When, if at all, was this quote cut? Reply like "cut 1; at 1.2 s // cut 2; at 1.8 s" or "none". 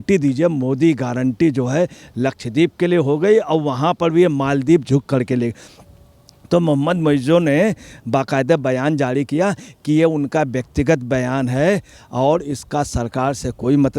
cut 1; at 5.7 s